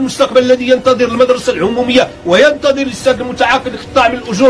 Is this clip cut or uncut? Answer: uncut